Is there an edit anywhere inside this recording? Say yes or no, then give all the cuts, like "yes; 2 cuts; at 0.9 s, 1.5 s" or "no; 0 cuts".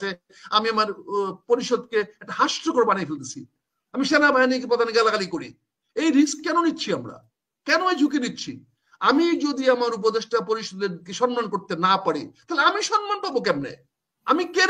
no; 0 cuts